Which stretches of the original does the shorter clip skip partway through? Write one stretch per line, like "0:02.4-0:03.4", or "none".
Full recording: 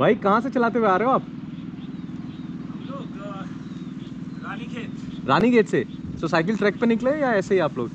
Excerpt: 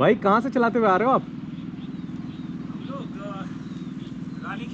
none